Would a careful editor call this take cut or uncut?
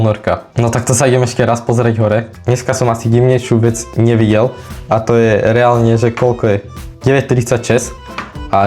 uncut